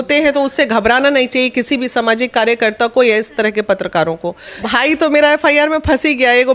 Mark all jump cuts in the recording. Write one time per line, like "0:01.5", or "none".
0:04.5